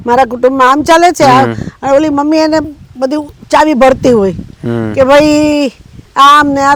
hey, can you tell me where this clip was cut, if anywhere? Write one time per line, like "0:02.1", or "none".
none